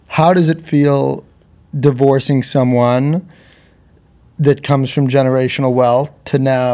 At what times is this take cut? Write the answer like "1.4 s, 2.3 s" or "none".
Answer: none